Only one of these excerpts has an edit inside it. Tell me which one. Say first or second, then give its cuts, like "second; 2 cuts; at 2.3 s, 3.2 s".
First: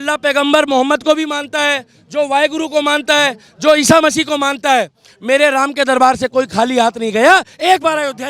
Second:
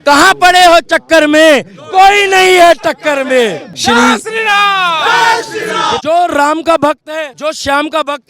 second; 3 cuts; at 3.7 s, 6.0 s, 7.3 s